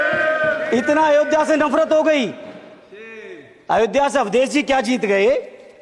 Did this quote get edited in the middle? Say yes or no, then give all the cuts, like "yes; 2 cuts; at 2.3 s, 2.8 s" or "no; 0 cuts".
no; 0 cuts